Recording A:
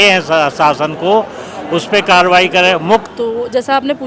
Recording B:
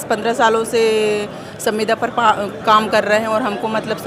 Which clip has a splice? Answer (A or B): A